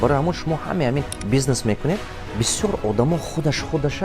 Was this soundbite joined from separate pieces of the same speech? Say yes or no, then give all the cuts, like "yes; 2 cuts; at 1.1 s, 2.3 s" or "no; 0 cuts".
yes; 1 cut; at 1.2 s